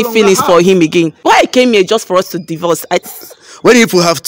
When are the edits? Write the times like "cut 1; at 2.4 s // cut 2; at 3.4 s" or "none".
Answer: cut 1; at 1.2 s // cut 2; at 3.1 s

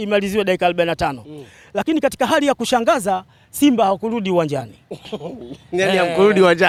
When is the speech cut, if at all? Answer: none

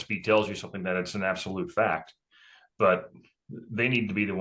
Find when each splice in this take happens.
none

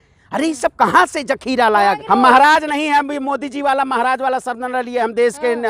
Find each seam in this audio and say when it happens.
cut 1; at 2.0 s

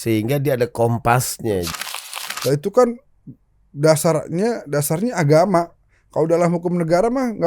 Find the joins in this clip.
cut 1; at 1.7 s

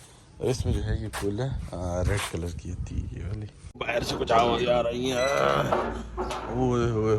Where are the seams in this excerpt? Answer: cut 1; at 3.8 s

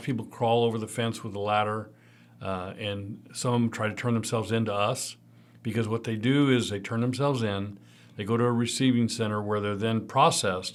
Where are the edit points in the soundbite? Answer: none

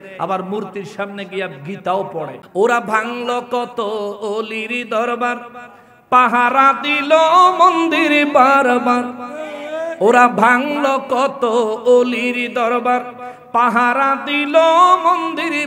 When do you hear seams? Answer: cut 1; at 2.4 s

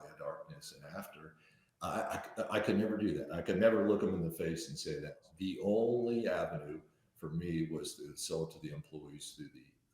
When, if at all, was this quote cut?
cut 1; at 5.1 s

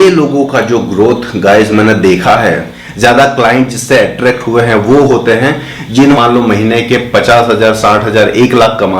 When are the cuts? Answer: cut 1; at 2.8 s // cut 2; at 6.2 s

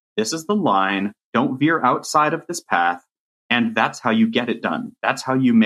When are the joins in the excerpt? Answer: cut 1; at 1.3 s

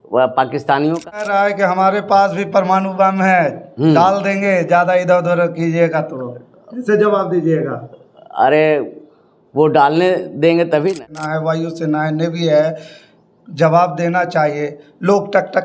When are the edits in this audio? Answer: cut 1; at 1.2 s // cut 2; at 11.0 s

